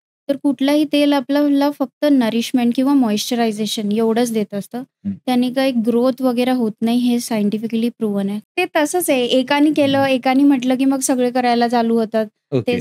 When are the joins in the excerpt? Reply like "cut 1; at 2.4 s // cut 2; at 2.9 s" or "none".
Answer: cut 1; at 8.4 s